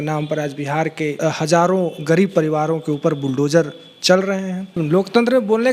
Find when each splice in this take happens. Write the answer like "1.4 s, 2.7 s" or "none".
1.2 s, 4.8 s